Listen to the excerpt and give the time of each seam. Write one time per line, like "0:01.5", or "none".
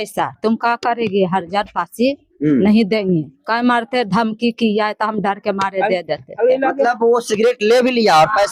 none